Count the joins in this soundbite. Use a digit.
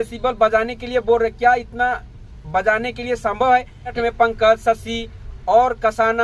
1